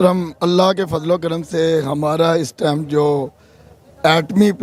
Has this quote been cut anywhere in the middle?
no; 0 cuts

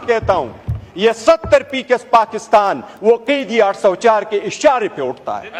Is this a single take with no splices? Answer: yes; 0 cuts

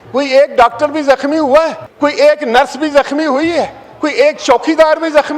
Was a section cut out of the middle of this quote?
yes; 1 cut; at 1.8 s

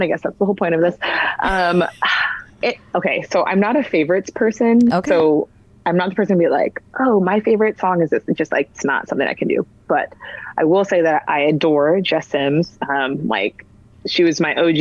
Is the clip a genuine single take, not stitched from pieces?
yes; 0 cuts

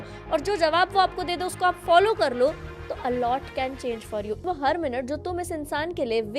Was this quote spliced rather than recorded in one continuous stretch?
yes; 1 cut; at 4.4 s

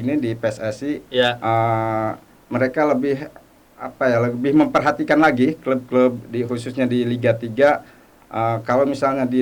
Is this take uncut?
yes; 0 cuts

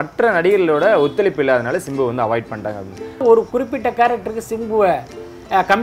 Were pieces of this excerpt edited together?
yes; 1 cut; at 3.2 s

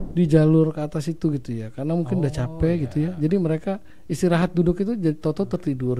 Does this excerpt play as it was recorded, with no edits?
yes; 0 cuts

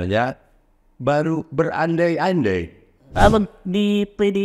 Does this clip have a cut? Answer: yes; 1 cut; at 3.1 s

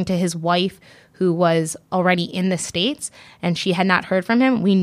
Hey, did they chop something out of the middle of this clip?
no; 0 cuts

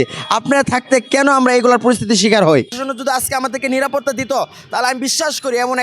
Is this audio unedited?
no; 1 cut; at 2.7 s

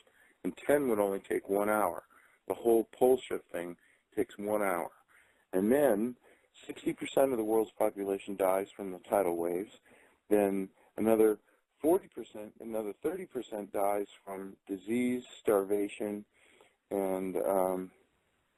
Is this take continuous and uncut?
yes; 0 cuts

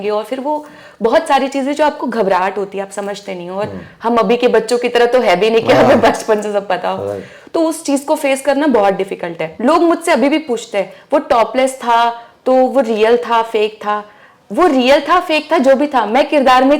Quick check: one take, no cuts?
no; 1 cut; at 9.4 s

